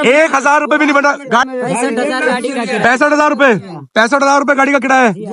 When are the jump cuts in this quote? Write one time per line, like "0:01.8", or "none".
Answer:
0:01.5